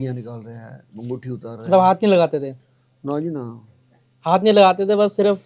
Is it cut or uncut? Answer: uncut